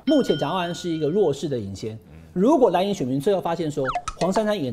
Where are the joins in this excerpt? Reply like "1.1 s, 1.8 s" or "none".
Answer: none

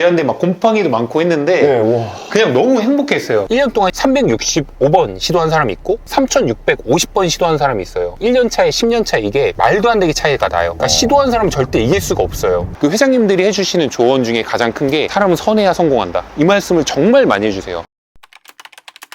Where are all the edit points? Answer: 3.5 s, 8.1 s, 12.7 s, 17.7 s

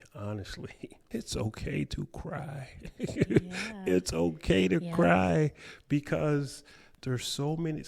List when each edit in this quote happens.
1.0 s

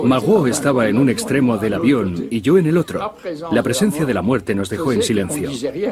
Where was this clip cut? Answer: 2.2 s

